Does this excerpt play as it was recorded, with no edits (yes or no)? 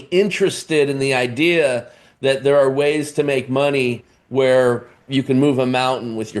no